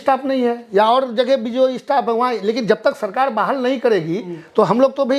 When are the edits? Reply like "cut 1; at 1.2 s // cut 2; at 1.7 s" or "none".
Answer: none